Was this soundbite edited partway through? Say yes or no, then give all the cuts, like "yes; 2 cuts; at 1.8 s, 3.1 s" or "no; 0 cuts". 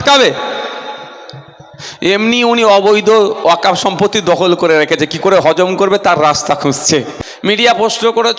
yes; 1 cut; at 7.1 s